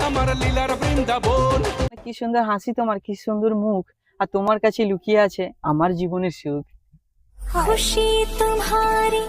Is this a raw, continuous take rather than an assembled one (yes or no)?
no